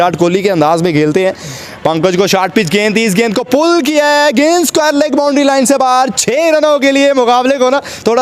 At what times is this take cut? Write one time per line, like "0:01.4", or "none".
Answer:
none